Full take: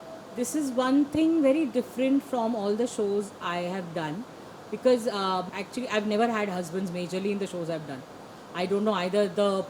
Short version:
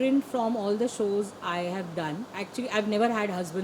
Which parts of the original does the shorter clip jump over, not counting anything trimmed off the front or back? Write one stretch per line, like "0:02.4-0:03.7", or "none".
0:04.4-0:05.6